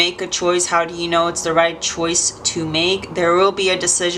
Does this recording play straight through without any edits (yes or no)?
yes